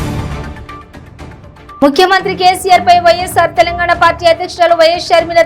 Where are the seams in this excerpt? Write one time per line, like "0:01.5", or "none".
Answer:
0:01.7